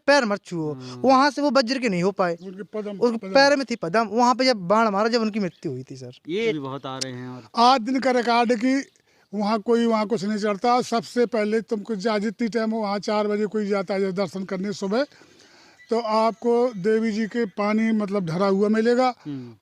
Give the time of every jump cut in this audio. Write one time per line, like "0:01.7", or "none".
0:06.5